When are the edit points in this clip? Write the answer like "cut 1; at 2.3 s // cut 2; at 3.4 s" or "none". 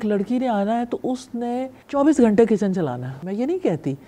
cut 1; at 1.8 s // cut 2; at 3.1 s

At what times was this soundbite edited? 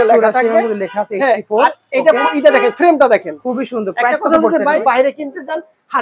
cut 1; at 4.8 s

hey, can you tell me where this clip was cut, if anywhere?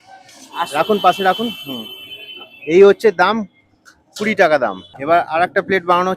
cut 1; at 4.9 s

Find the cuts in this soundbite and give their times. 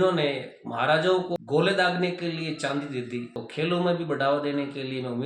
cut 1; at 1.3 s

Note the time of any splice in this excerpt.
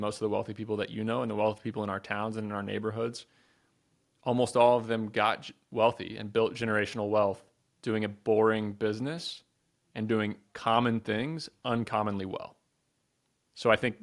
none

